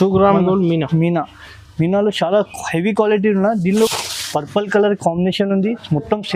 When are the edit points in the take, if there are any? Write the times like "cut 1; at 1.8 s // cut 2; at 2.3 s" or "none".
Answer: cut 1; at 3.9 s

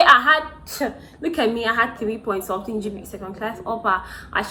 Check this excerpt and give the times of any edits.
none

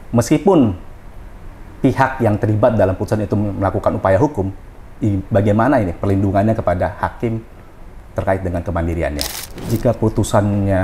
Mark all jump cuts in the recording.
cut 1; at 9.7 s

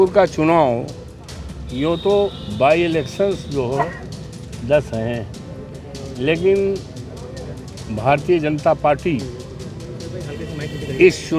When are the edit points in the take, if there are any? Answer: none

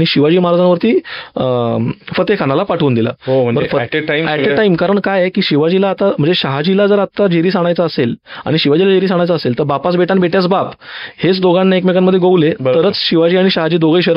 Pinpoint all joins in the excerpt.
none

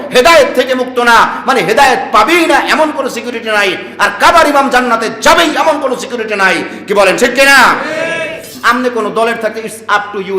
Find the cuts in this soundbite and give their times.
cut 1; at 8.4 s

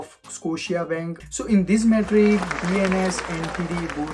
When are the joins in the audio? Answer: cut 1; at 1.2 s

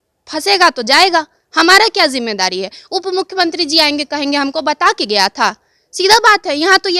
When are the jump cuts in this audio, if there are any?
none

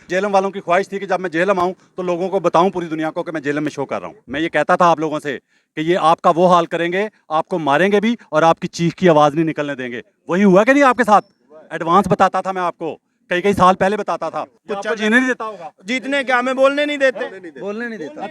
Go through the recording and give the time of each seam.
cut 1; at 4.2 s // cut 2; at 14.6 s

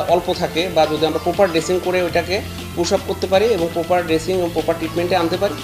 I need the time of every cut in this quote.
none

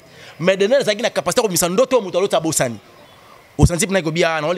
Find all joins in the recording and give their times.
cut 1; at 3.1 s

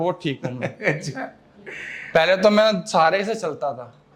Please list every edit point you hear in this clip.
none

